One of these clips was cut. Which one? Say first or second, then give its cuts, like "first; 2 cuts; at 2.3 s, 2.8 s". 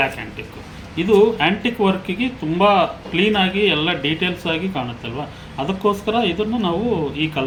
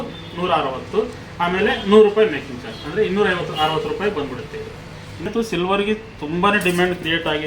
second; 1 cut; at 5.2 s